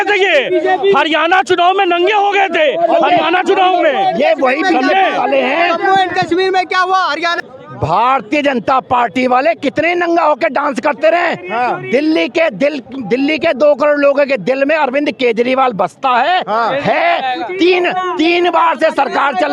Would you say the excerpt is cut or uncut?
uncut